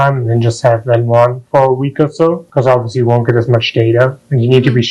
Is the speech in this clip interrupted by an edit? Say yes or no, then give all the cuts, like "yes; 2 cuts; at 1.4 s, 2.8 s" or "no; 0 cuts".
no; 0 cuts